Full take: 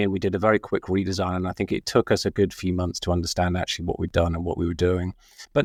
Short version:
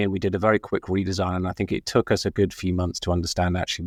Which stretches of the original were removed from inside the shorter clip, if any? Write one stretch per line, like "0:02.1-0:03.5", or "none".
none